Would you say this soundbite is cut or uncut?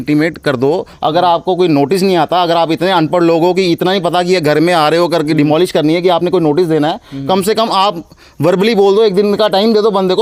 uncut